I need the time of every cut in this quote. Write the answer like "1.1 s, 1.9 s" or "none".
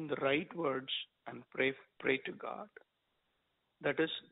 1.9 s